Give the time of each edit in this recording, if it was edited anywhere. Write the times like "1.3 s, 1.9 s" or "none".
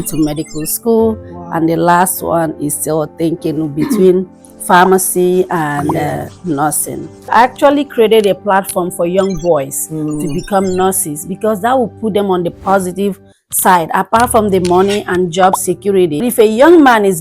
7.3 s, 16.2 s